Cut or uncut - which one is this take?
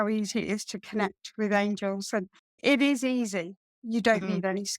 cut